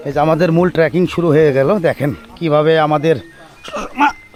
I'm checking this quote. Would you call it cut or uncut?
uncut